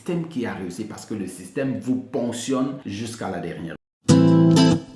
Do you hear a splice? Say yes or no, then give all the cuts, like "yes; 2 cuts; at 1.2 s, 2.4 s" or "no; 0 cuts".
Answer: yes; 2 cuts; at 2.8 s, 3.8 s